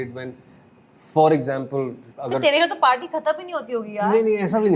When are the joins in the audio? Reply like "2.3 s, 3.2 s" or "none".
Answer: none